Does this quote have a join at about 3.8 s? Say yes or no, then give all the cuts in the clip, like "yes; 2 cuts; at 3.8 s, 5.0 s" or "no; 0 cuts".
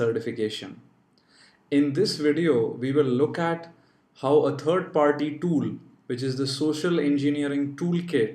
no; 1 cut; at 5.9 s